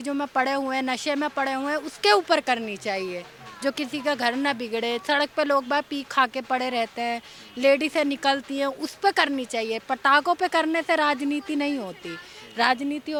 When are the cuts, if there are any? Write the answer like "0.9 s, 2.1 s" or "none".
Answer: none